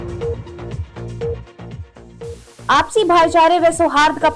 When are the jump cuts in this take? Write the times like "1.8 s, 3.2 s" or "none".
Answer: none